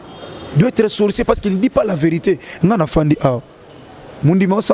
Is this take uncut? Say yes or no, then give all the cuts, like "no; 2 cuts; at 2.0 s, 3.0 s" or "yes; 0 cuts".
no; 1 cut; at 2.5 s